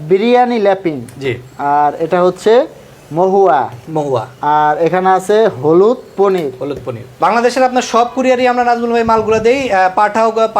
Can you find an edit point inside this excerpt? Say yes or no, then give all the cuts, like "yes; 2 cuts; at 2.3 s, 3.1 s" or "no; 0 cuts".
yes; 1 cut; at 7.1 s